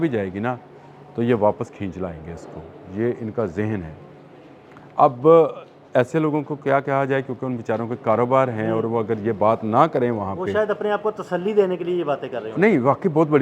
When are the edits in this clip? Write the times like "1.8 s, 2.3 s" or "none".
none